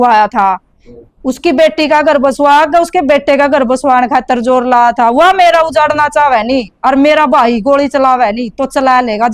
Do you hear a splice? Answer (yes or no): no